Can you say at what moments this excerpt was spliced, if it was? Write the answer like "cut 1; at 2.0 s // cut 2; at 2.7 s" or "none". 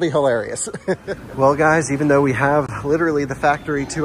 none